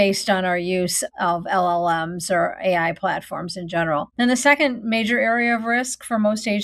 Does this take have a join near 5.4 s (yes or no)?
no